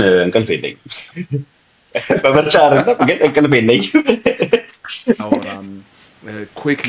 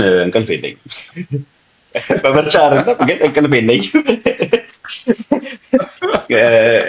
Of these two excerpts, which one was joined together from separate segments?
first; 1 cut; at 5.5 s

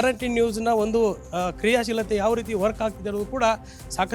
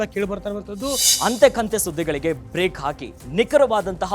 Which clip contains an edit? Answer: second; 1 cut; at 1.1 s

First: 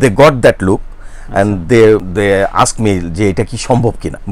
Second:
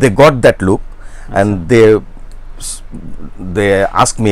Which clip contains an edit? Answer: first; 1 cut; at 2.1 s

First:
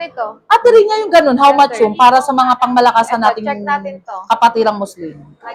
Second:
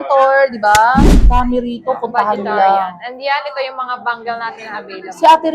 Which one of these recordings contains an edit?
second; 1 cut; at 1.4 s

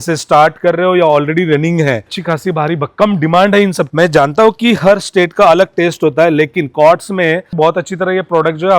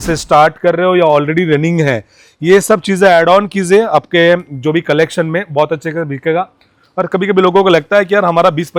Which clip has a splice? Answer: first; 3 cuts; at 2.2 s, 3.9 s, 7.5 s

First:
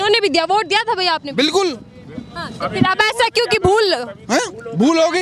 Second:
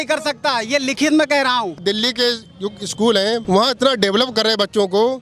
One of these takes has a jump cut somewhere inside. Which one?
second; 2 cuts; at 1.8 s, 3.4 s

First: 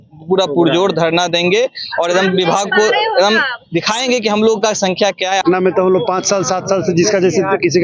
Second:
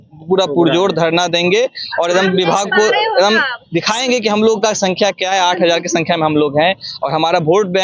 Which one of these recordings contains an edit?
first; 1 cut; at 5.4 s

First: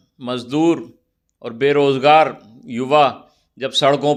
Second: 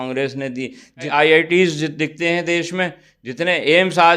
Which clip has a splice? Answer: second; 1 cut; at 1.1 s

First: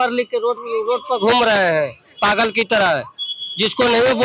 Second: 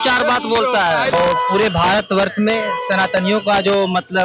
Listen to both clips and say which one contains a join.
second; 1 cut; at 1.1 s

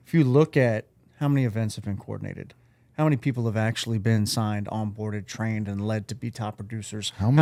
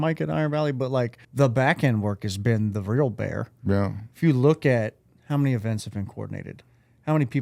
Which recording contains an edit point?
second; 1 cut; at 1.2 s

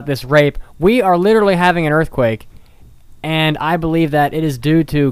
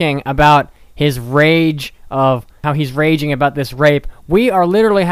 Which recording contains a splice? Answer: second; 1 cut; at 2.6 s

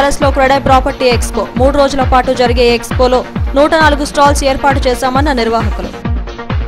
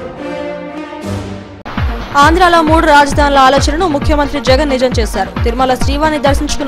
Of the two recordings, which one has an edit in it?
second; 1 cut; at 1.0 s

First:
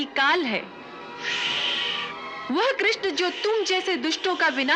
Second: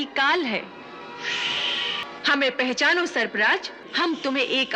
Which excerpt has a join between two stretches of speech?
second; 2 cuts; at 2.0 s, 3.9 s

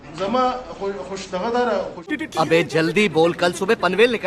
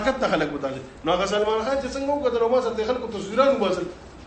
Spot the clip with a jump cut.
first; 1 cut; at 2.0 s

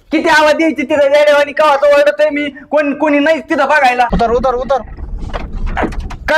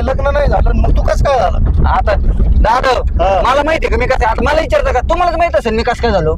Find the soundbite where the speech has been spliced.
first; 1 cut; at 4.1 s

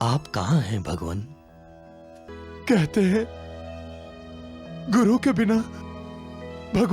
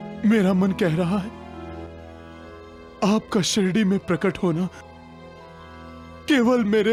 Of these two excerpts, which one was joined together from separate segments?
first; 1 cut; at 2.3 s

